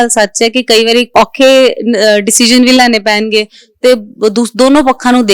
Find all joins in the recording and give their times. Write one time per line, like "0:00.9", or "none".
0:01.1